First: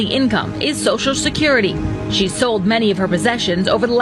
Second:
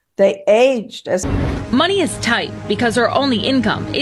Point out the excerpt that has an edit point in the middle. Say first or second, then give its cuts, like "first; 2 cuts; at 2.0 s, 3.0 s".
second; 1 cut; at 1.2 s